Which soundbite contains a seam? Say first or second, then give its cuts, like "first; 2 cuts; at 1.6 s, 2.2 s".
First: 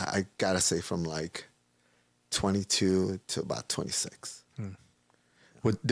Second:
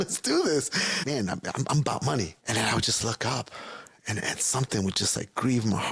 second; 2 cuts; at 1.0 s, 2.4 s